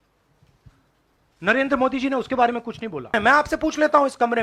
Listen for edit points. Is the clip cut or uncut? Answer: cut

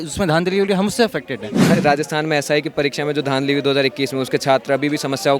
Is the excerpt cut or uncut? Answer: cut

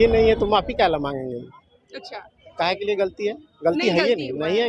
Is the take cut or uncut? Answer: uncut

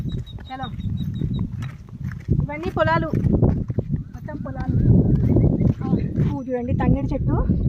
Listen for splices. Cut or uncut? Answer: cut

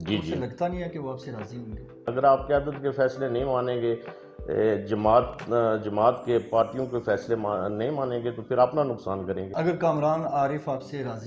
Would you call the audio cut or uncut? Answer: cut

